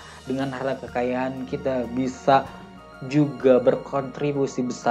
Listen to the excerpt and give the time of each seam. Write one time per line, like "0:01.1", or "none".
none